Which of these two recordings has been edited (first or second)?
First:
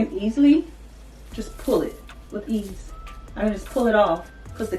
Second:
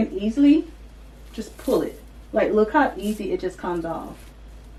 first